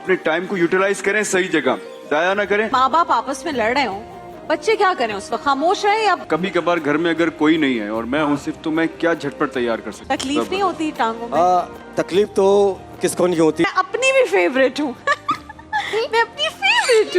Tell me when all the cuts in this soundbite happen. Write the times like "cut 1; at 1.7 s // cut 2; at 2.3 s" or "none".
cut 1; at 2.7 s // cut 2; at 6.2 s // cut 3; at 9.9 s // cut 4; at 13.6 s